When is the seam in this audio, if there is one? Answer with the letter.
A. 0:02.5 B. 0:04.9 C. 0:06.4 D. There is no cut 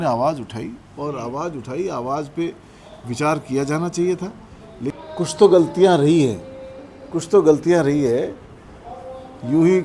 B